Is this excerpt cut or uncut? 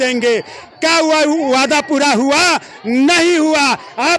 uncut